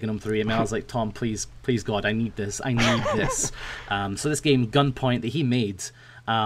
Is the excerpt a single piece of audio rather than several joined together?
yes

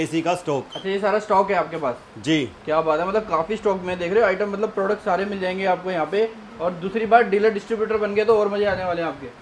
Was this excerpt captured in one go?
yes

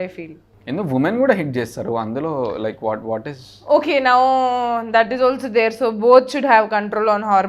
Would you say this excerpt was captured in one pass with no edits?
yes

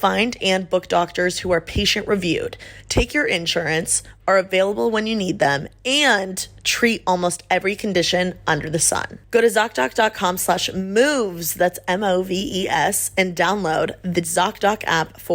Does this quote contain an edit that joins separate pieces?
yes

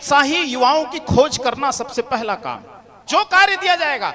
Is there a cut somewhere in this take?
yes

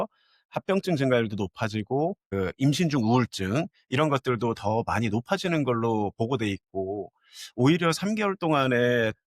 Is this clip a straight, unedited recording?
no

